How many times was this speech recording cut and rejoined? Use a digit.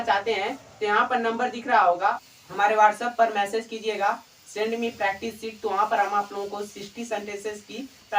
1